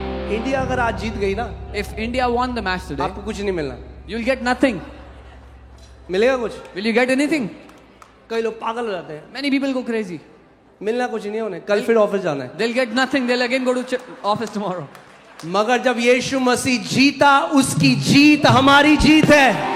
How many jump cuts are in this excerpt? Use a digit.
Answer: 0